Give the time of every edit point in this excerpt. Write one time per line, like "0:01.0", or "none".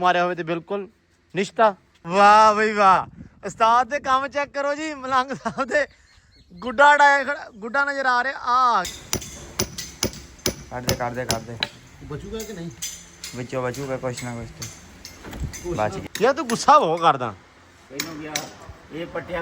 0:01.9
0:08.9
0:16.0